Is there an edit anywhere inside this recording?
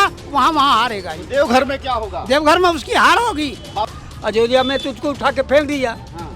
yes; 1 cut; at 3.9 s

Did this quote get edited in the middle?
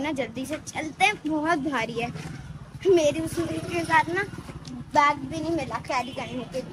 no; 0 cuts

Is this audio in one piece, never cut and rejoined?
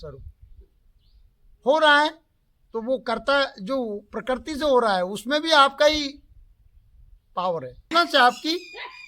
no; 1 cut; at 7.9 s

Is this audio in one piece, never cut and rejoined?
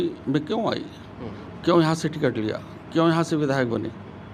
yes; 0 cuts

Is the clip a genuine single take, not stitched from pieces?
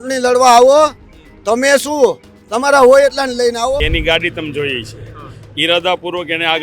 no; 1 cut; at 3.8 s

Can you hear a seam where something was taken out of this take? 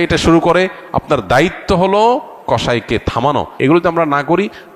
yes; 1 cut; at 3.6 s

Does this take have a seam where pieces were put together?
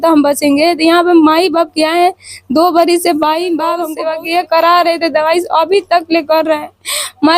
yes; 1 cut; at 3.9 s

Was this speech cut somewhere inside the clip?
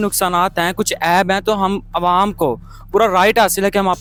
no; 0 cuts

